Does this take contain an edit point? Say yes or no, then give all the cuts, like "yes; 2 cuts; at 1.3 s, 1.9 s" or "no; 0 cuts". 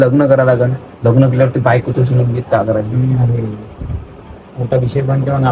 no; 0 cuts